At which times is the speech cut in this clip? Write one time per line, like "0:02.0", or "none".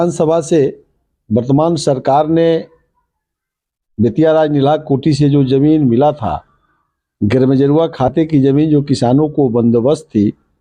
none